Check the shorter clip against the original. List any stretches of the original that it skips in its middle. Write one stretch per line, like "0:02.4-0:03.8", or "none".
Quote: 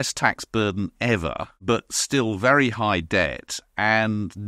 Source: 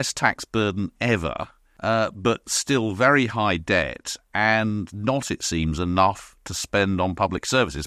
0:01.6-0:02.1